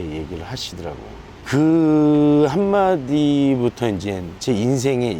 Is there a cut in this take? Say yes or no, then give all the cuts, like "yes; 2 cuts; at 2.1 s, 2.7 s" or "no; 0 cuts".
no; 0 cuts